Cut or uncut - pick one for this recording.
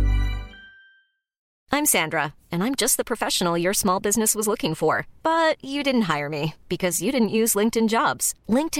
cut